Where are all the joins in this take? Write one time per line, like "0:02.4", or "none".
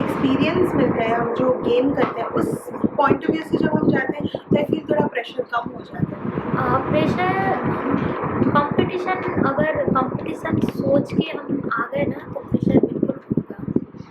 0:06.2